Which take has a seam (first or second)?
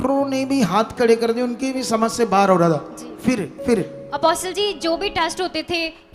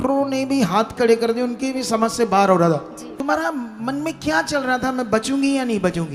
second